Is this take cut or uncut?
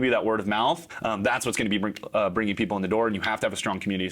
cut